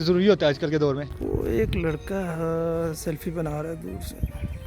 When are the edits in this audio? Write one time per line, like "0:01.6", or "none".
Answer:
none

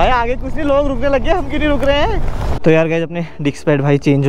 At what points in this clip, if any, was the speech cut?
0:02.6

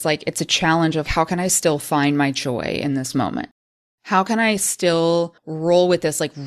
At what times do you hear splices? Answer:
0:03.6
0:05.4

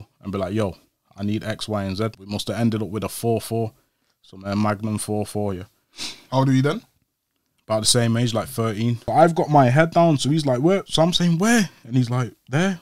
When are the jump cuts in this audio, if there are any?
0:02.2
0:09.0

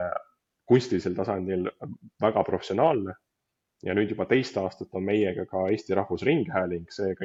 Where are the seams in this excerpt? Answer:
none

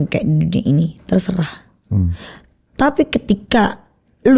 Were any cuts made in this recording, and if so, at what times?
none

